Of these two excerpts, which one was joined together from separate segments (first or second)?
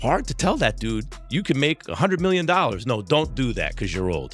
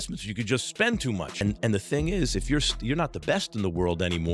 second